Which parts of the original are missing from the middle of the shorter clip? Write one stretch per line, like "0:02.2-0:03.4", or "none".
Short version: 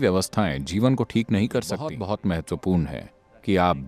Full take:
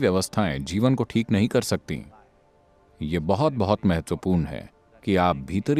0:02.0-0:03.6